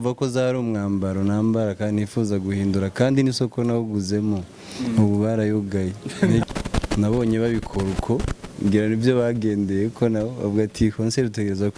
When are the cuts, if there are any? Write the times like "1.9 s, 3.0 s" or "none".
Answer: 6.4 s